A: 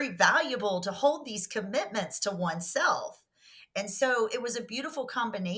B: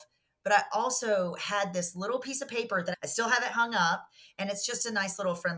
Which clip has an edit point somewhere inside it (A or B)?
B